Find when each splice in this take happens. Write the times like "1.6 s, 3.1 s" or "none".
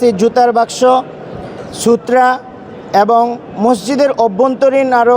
none